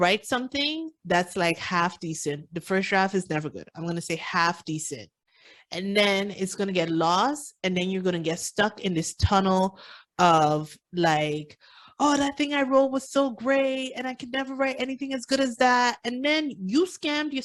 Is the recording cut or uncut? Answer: uncut